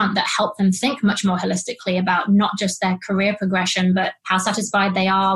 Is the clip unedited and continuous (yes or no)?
no